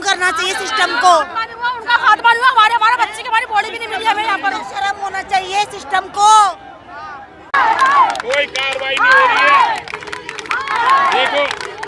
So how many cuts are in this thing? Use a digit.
1